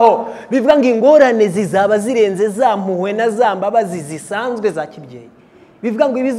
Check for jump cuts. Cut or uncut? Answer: uncut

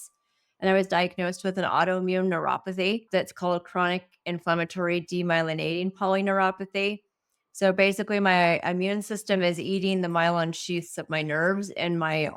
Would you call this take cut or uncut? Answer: cut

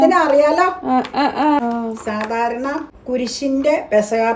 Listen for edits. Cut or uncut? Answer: cut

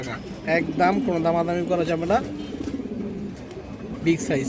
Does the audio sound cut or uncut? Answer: uncut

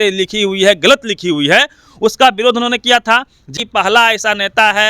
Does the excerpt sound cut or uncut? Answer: cut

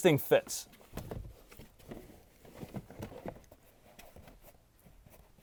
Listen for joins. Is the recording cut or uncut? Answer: uncut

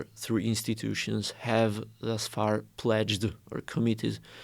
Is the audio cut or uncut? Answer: uncut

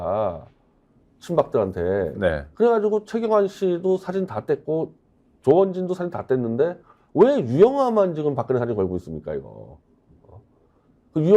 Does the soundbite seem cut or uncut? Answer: uncut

